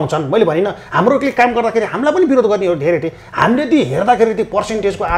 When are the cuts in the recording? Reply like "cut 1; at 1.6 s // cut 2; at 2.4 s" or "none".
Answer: none